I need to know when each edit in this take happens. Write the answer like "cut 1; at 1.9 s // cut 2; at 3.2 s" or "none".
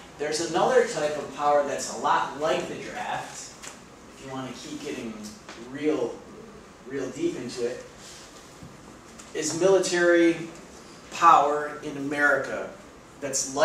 none

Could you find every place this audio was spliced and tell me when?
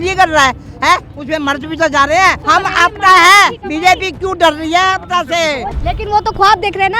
cut 1; at 2.4 s // cut 2; at 5.7 s

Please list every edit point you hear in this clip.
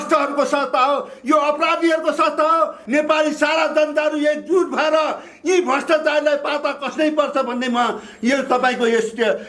cut 1; at 2.8 s

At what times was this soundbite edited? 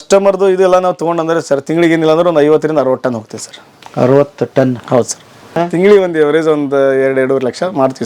cut 1; at 5.6 s

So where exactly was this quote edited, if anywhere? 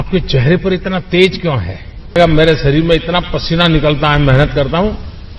cut 1; at 2.2 s

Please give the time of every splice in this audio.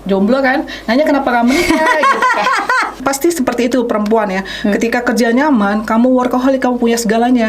cut 1; at 3.0 s

